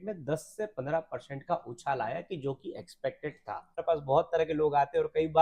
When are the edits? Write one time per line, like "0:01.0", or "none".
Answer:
0:03.8